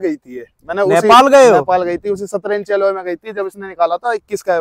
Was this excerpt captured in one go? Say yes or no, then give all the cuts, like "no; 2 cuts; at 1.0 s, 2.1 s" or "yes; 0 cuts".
yes; 0 cuts